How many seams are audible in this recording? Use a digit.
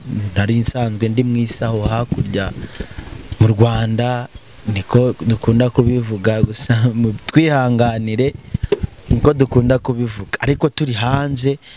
0